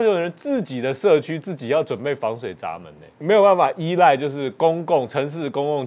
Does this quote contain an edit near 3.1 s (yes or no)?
yes